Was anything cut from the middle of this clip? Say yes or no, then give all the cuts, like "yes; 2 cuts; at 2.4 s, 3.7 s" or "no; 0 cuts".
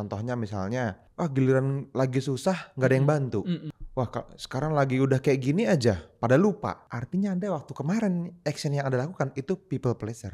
yes; 3 cuts; at 1.0 s, 3.8 s, 6.9 s